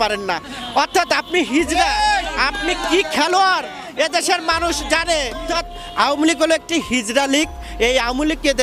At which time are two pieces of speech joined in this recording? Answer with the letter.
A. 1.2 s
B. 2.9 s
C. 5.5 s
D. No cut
C